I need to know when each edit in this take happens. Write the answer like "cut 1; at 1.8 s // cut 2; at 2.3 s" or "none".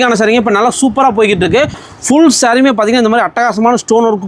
cut 1; at 1.8 s